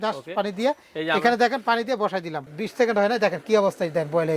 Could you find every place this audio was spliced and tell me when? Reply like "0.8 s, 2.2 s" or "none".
2.5 s